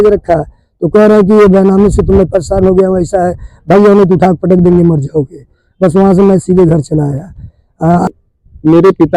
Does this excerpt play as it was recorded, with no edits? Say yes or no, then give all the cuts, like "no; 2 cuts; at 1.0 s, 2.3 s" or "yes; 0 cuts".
no; 1 cut; at 8.1 s